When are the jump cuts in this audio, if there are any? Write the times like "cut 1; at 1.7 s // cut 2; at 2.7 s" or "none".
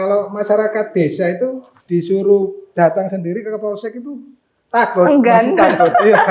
cut 1; at 1.7 s // cut 2; at 2.6 s